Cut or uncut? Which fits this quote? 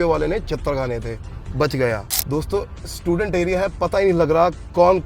cut